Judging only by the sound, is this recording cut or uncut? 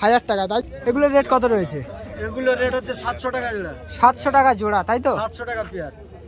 cut